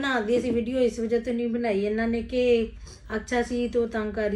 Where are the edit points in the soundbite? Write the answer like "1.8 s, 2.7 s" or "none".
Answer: none